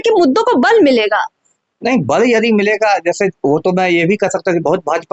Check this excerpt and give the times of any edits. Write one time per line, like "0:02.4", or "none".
none